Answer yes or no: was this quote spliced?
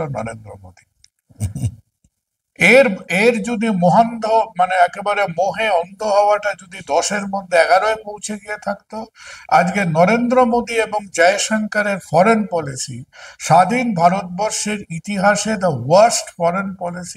no